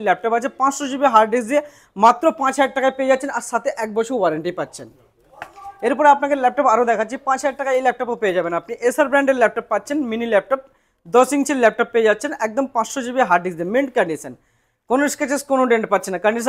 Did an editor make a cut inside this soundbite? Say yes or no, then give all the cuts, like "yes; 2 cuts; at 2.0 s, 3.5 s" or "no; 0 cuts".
no; 0 cuts